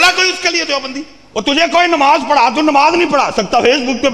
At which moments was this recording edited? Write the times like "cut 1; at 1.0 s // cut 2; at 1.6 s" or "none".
cut 1; at 1.1 s